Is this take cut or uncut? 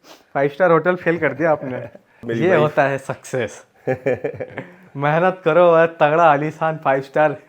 cut